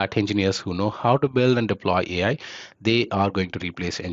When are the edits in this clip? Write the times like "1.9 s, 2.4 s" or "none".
none

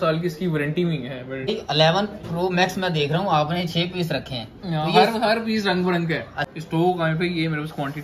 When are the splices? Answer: 1.5 s, 6.3 s

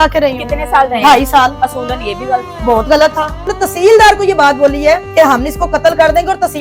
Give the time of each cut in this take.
3.4 s, 5.1 s

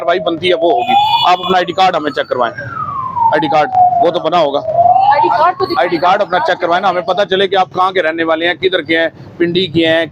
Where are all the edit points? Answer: none

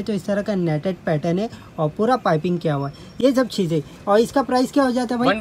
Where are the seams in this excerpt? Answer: none

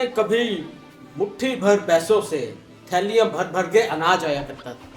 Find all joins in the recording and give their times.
none

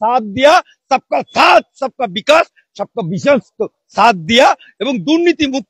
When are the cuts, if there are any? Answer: none

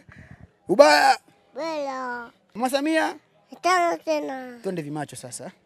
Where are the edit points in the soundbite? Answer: 2.6 s

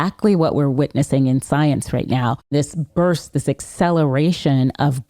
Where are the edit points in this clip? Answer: 2.5 s

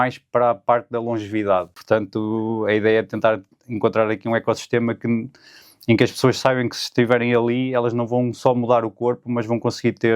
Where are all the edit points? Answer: 1.8 s

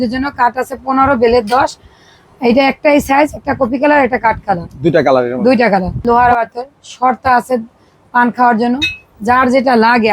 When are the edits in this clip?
6.0 s

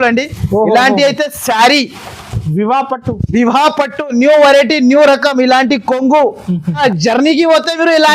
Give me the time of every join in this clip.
6.8 s

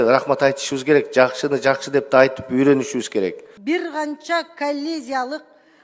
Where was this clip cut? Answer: 3.5 s

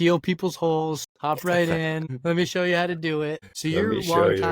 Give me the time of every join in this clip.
1.1 s, 2.1 s, 3.5 s

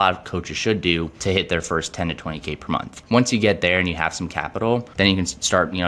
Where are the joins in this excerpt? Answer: 1.1 s, 2.9 s, 4.9 s

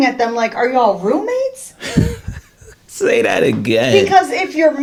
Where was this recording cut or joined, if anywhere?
none

